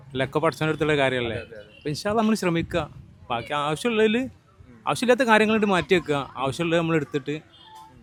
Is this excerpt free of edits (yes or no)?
yes